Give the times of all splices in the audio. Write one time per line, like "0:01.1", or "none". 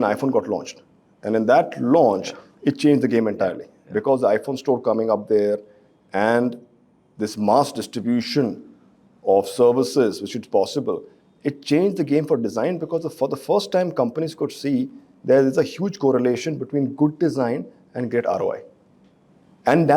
none